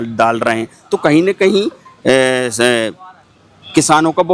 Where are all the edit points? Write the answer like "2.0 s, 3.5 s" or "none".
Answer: none